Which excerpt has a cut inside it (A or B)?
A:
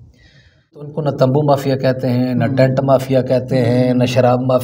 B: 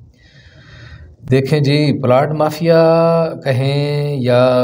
A